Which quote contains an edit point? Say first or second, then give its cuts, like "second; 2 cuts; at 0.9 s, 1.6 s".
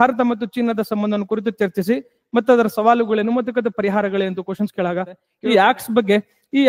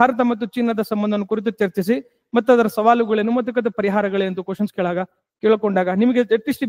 first; 1 cut; at 5.3 s